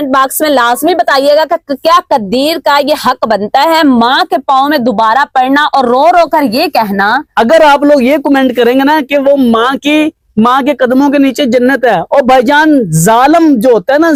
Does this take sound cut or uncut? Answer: uncut